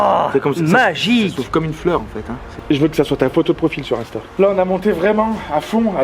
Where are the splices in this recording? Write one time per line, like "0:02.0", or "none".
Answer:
0:02.5
0:04.3